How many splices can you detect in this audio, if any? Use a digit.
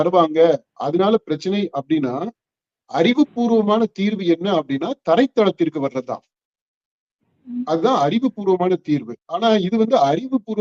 0